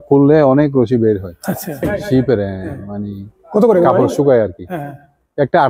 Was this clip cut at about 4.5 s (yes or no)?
no